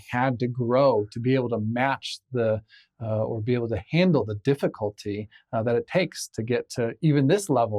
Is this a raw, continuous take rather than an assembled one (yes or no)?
yes